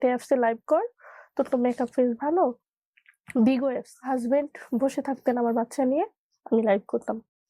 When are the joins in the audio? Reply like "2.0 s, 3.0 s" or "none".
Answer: 2.7 s, 3.9 s

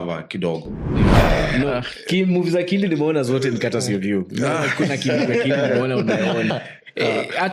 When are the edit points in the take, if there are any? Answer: 1.2 s

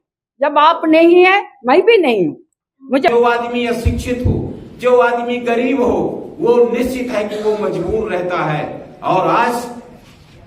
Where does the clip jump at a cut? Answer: 3.1 s

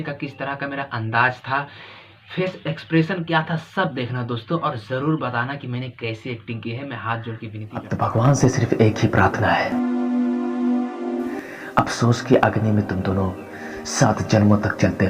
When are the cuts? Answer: 7.9 s

